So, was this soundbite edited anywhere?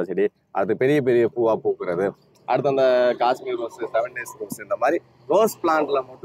no; 0 cuts

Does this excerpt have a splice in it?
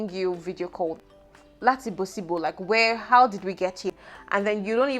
yes; 2 cuts; at 1.0 s, 3.8 s

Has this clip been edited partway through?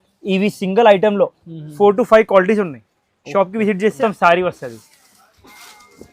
yes; 1 cut; at 4.0 s

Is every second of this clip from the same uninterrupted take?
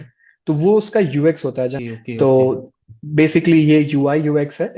no; 1 cut; at 1.8 s

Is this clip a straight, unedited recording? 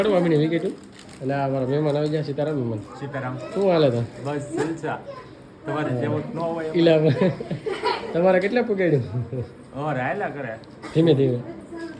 yes; 0 cuts

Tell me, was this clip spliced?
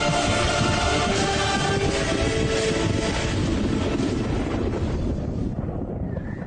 no; 0 cuts

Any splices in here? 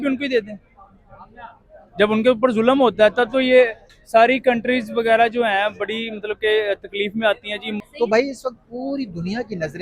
yes; 1 cut; at 7.9 s

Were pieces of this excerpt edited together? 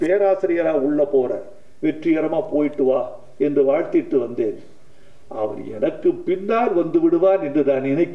no; 0 cuts

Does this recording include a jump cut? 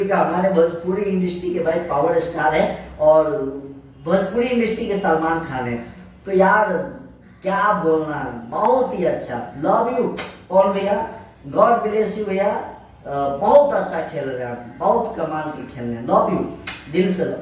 no; 0 cuts

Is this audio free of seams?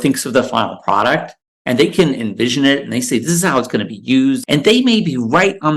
no; 1 cut; at 4.4 s

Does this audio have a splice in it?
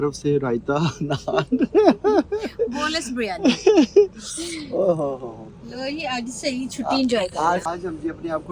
no; 0 cuts

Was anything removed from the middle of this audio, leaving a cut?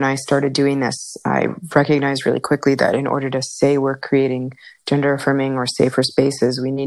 no; 0 cuts

